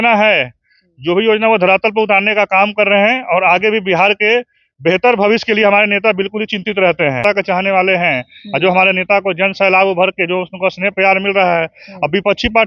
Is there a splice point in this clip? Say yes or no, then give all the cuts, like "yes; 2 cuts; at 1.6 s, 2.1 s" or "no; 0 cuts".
yes; 1 cut; at 7.2 s